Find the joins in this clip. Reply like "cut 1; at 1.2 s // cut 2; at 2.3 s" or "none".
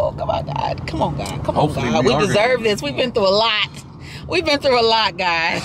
none